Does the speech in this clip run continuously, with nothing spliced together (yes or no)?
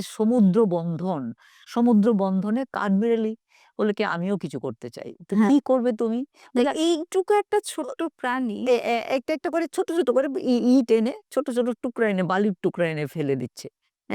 yes